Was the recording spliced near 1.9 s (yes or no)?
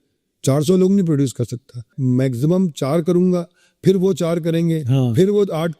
yes